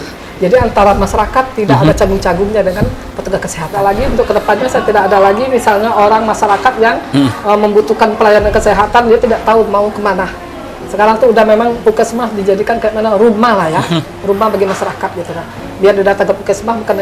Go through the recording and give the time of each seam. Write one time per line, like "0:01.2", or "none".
0:03.7